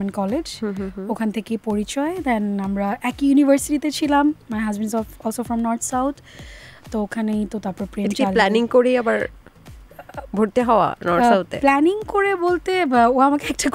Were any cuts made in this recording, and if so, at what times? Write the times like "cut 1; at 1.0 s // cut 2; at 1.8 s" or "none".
none